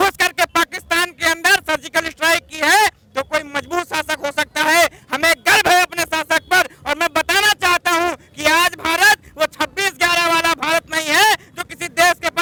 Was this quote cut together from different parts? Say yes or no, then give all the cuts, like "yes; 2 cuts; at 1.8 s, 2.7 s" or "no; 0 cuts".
no; 0 cuts